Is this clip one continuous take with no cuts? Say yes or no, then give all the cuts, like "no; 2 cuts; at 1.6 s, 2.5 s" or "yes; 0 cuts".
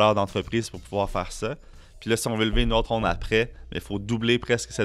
no; 1 cut; at 2.9 s